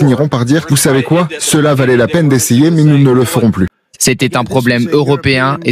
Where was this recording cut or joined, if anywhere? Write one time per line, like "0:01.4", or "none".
0:03.7